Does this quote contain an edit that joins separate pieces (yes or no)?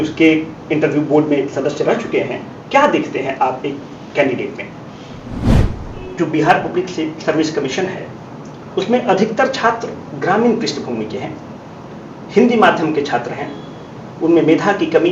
yes